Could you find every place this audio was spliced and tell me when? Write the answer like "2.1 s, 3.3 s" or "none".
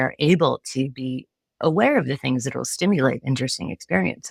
none